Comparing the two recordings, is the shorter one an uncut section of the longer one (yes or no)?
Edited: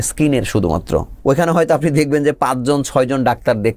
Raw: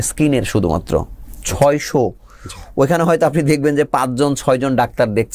no